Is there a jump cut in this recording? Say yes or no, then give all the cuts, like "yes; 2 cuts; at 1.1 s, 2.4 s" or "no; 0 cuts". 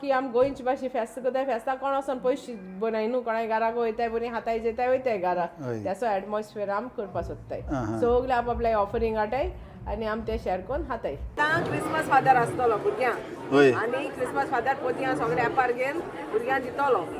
yes; 1 cut; at 11.3 s